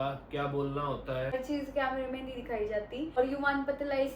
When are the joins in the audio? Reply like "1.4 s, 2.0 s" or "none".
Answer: 1.3 s, 3.2 s